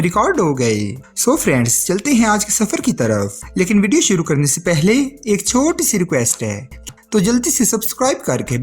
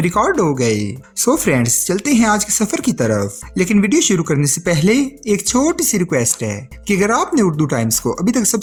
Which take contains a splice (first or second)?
first